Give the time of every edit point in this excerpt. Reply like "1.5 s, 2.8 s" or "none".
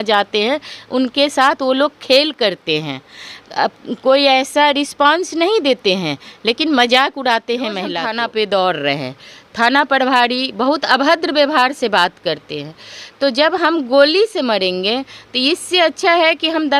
8.0 s